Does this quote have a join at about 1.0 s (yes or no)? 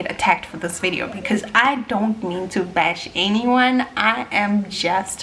no